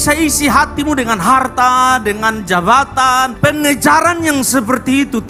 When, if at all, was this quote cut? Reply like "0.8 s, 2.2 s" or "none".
none